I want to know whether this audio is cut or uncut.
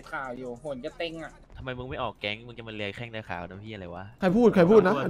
cut